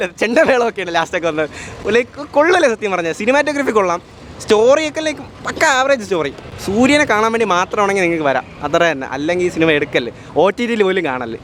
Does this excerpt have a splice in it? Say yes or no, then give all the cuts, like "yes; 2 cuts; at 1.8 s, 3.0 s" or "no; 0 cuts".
no; 0 cuts